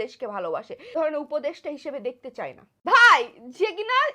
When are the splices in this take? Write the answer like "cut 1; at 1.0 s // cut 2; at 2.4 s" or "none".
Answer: cut 1; at 0.9 s // cut 2; at 2.6 s